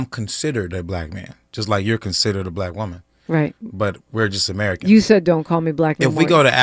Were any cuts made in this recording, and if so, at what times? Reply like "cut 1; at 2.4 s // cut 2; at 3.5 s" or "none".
none